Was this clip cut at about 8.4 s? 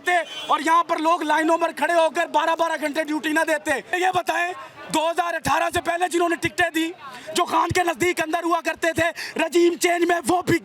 no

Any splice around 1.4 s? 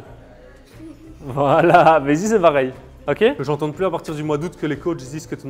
no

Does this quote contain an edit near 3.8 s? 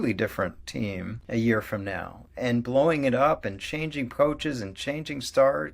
no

